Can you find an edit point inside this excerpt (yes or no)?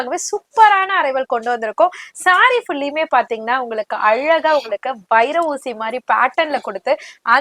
no